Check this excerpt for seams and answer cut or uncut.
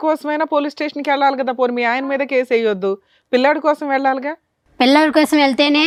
uncut